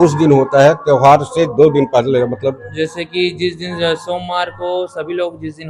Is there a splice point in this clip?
no; 0 cuts

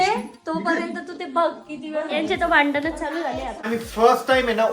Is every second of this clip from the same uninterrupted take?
no; 1 cut; at 3.6 s

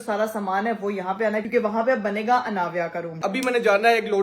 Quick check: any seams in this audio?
yes; 2 cuts; at 1.4 s, 3.3 s

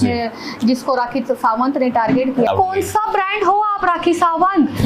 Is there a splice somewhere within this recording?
yes; 1 cut; at 2.5 s

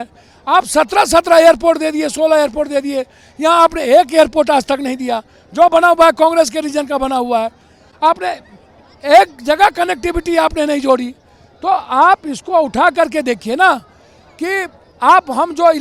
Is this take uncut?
yes; 0 cuts

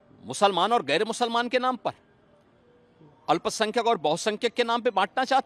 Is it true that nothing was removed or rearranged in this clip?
yes; 0 cuts

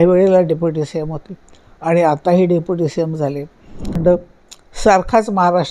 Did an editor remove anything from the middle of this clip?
yes; 1 cut; at 4.0 s

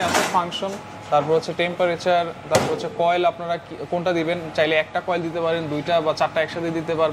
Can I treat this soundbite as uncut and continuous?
yes; 0 cuts

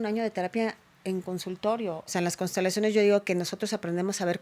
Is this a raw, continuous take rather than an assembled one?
no; 1 cut; at 2.0 s

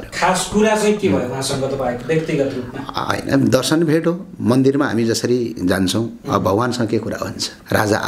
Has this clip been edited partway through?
no; 0 cuts

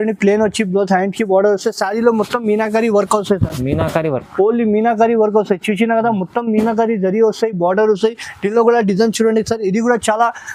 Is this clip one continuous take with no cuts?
yes; 0 cuts

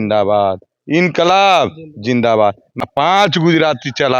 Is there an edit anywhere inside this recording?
yes; 1 cut; at 2.7 s

